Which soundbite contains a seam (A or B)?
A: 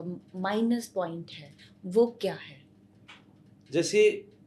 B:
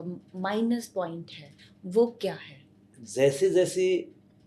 B